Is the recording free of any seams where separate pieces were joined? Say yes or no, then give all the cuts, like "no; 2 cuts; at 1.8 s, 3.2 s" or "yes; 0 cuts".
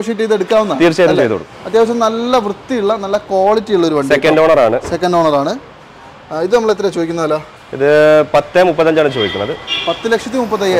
no; 1 cut; at 1.5 s